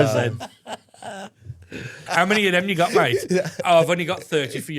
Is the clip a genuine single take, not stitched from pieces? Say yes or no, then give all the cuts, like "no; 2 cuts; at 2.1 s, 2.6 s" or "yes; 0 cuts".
no; 1 cut; at 2.0 s